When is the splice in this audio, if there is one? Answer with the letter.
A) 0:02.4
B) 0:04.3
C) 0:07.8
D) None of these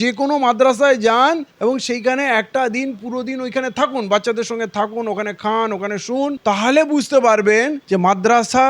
C